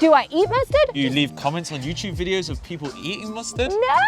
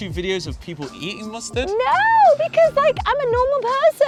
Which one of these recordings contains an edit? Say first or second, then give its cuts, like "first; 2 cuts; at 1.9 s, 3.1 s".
first; 1 cut; at 1.1 s